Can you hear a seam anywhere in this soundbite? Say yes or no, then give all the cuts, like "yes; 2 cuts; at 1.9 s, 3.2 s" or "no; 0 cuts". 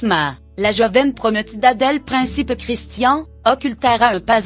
yes; 1 cut; at 2.4 s